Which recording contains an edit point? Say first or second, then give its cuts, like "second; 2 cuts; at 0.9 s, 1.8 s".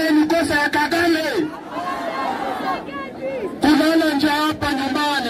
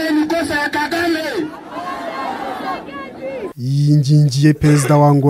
second; 1 cut; at 3.5 s